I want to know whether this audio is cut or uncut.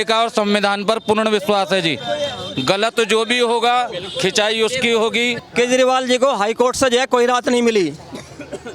cut